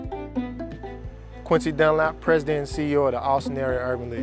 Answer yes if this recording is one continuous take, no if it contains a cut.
yes